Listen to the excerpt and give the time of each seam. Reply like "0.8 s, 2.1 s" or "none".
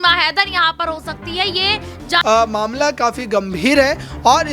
2.2 s